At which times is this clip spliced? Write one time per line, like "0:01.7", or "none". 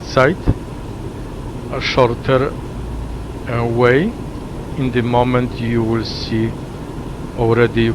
0:03.8